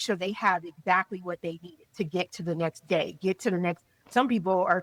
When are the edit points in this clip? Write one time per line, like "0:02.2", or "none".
none